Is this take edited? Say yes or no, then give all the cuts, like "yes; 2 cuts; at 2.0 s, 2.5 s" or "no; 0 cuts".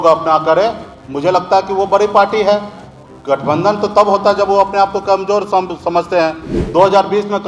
no; 0 cuts